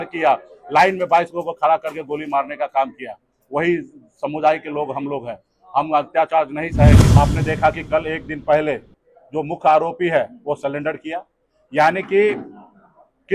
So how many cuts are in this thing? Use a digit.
1